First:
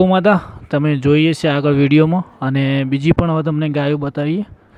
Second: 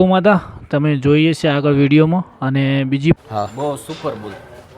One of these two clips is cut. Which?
second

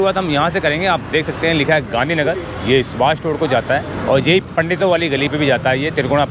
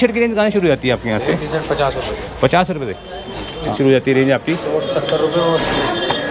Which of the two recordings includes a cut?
second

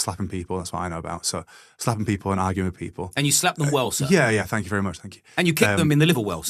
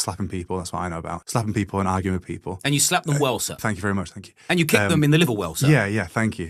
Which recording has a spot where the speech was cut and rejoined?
second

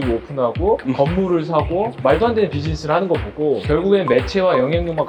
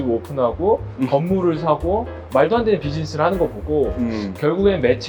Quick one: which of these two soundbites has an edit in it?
first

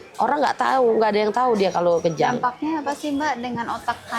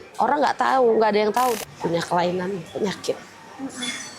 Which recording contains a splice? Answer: second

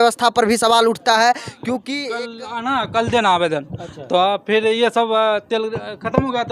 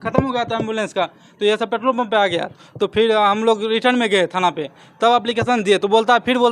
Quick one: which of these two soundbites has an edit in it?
first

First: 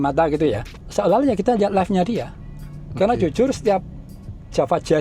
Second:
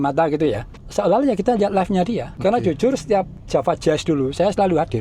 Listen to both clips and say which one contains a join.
second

